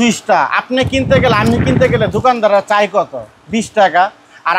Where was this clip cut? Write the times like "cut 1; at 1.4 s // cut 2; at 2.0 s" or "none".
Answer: none